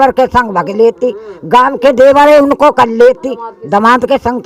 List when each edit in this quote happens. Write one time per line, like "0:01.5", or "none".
none